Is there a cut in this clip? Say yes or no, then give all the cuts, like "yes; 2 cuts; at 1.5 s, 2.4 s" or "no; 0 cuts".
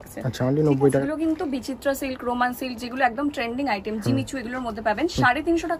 yes; 1 cut; at 1.1 s